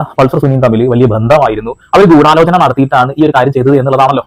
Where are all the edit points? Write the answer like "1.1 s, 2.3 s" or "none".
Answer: none